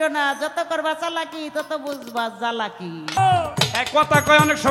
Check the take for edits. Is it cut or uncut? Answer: cut